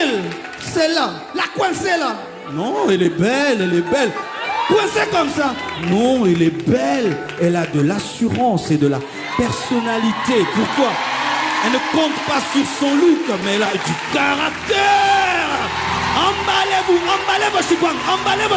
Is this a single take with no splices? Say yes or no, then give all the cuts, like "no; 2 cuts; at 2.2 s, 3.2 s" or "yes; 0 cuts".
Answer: yes; 0 cuts